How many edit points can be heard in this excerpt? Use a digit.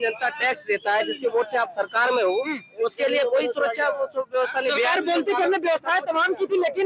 0